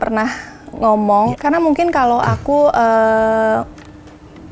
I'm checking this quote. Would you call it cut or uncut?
cut